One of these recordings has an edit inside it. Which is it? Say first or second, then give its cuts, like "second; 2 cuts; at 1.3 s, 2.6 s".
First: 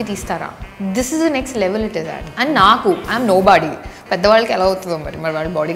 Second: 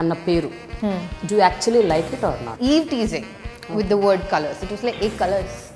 second; 1 cut; at 2.5 s